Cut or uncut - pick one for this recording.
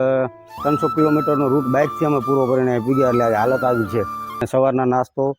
cut